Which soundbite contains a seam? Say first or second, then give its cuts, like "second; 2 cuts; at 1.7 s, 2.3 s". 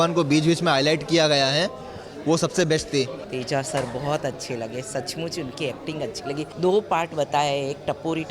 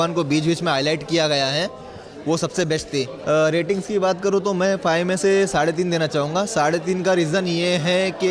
first; 2 cuts; at 3.2 s, 6.5 s